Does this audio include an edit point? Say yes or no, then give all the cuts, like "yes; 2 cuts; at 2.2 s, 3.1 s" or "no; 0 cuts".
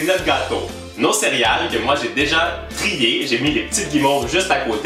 no; 0 cuts